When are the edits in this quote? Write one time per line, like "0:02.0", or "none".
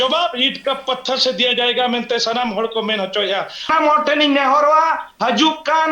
0:03.7